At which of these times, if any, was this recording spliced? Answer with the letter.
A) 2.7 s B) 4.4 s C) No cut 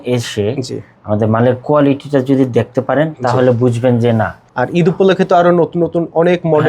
B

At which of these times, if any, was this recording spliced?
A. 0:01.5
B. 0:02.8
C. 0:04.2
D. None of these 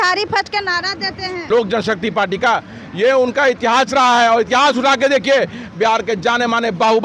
A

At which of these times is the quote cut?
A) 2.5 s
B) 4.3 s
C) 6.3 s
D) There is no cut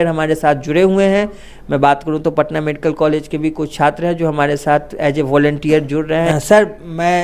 C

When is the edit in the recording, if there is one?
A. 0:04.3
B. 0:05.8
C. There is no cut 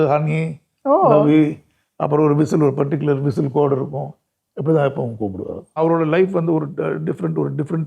B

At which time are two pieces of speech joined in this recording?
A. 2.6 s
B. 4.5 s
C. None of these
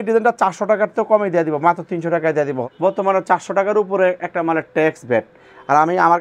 A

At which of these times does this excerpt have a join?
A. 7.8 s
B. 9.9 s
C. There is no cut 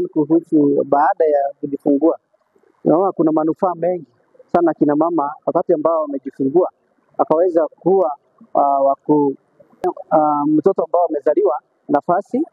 B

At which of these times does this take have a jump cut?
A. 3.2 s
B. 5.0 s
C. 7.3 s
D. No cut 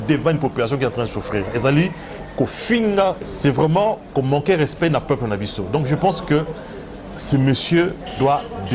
A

